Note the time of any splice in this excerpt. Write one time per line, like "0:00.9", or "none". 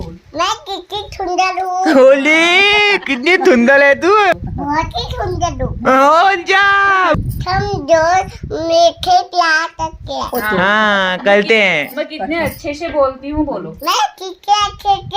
0:04.3
0:07.2